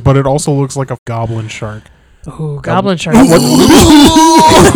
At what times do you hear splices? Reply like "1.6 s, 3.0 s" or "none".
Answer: 1.0 s